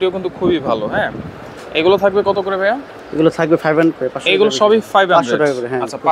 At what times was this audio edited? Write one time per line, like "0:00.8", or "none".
none